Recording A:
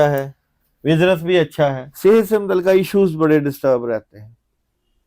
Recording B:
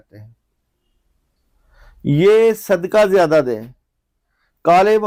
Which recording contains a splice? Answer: A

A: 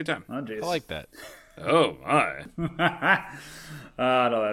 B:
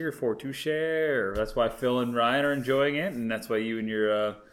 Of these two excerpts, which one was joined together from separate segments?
A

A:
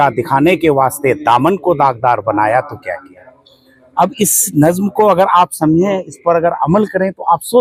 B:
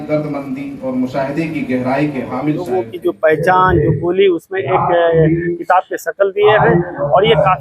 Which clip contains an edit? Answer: B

